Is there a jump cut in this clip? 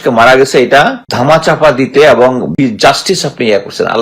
yes; 2 cuts; at 1.0 s, 2.5 s

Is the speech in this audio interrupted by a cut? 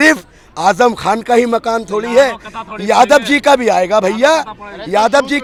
no; 0 cuts

